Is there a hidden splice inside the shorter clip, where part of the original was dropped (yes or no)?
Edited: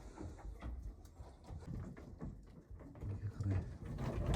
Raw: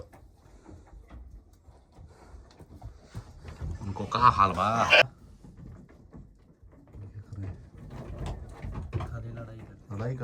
yes